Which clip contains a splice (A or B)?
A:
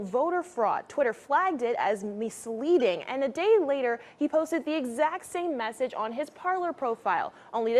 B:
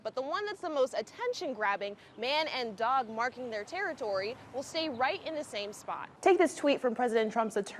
B